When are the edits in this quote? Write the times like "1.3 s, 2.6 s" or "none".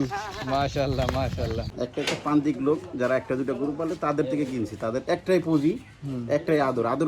1.7 s